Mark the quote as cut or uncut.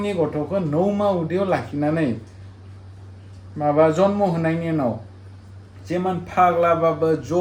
uncut